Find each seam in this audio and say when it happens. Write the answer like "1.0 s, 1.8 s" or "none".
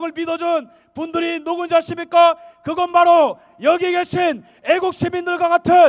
none